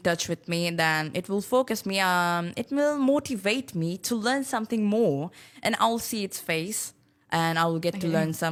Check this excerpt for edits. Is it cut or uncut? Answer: uncut